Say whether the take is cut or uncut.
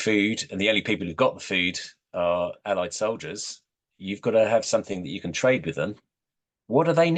uncut